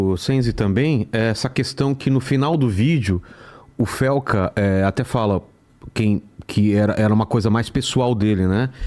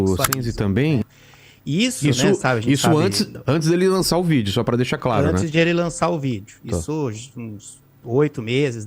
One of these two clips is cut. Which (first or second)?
second